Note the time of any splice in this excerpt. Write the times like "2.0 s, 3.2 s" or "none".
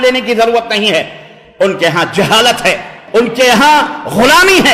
3.0 s